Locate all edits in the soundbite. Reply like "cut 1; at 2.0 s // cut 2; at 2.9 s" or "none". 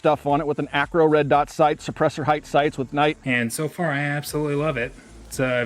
cut 1; at 3.2 s